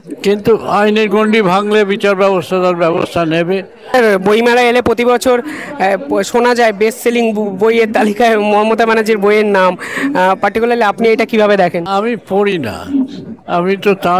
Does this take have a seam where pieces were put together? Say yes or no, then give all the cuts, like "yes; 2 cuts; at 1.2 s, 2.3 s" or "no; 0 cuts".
yes; 2 cuts; at 3.9 s, 11.9 s